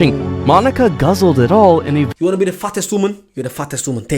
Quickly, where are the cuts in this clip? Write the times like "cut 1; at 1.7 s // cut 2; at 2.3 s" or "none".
cut 1; at 2.1 s